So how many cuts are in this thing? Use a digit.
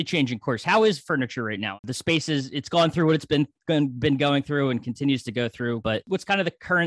2